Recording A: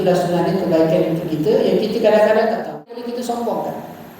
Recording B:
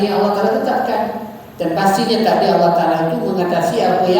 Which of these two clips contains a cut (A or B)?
A